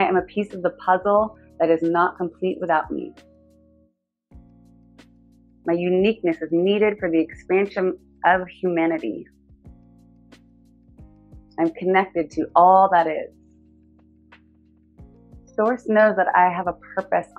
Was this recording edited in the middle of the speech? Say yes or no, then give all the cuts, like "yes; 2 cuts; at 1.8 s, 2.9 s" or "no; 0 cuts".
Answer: no; 0 cuts